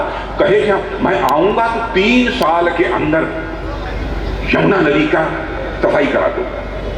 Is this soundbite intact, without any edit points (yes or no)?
yes